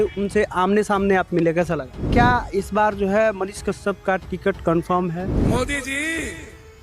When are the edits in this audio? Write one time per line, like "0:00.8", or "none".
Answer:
0:02.1
0:05.4